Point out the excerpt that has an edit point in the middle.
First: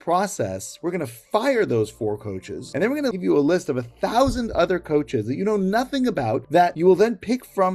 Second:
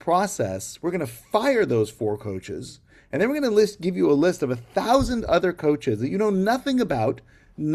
first; 2 cuts; at 3.1 s, 6.6 s

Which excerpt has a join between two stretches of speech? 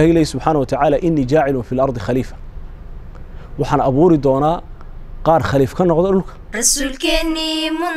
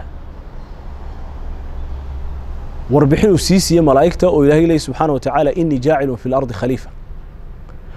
first; 1 cut; at 6.4 s

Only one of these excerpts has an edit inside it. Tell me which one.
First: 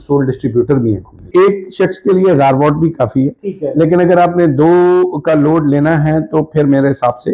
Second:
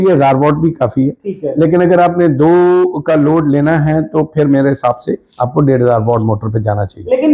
first; 1 cut; at 1.3 s

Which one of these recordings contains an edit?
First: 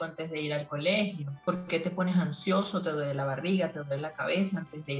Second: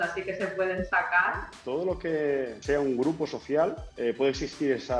second; 3 cuts; at 1.5 s, 2.6 s, 3.9 s

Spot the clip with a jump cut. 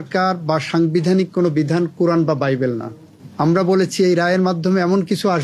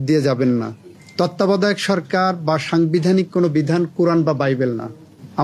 second; 1 cut; at 1.0 s

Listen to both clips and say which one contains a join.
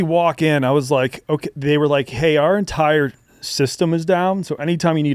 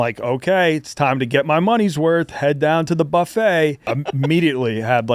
second; 1 cut; at 3.9 s

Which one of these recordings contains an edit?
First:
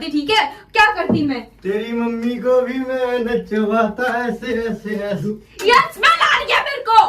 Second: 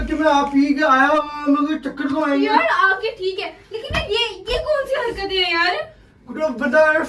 first; 1 cut; at 5.2 s

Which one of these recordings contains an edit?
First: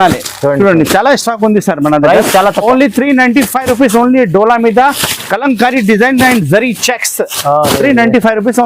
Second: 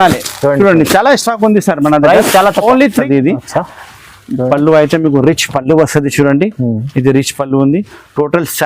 second; 1 cut; at 3.1 s

